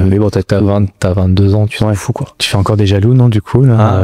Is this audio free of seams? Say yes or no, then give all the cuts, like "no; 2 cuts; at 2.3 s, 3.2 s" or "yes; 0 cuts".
no; 1 cut; at 2.3 s